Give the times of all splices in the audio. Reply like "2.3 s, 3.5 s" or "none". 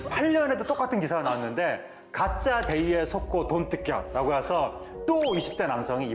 none

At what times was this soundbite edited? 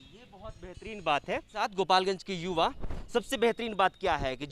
none

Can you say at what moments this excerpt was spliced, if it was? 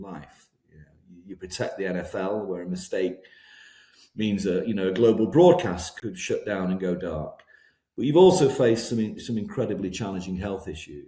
6.0 s

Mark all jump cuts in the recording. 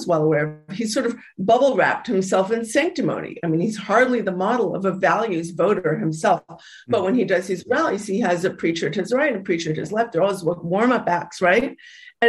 none

